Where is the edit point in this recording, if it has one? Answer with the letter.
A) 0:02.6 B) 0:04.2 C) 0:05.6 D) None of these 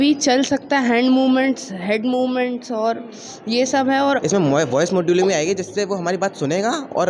B